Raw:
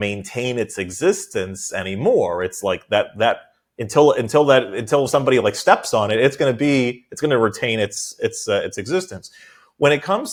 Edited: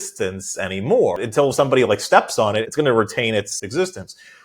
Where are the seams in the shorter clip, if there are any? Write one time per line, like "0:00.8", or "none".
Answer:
0:01.2
0:02.6
0:03.6